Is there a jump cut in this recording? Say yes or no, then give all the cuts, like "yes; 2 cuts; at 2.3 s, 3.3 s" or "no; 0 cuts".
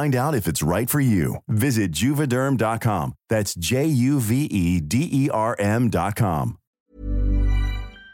yes; 1 cut; at 6.6 s